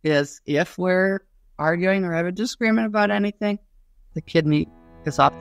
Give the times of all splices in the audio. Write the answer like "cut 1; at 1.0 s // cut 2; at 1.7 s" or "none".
none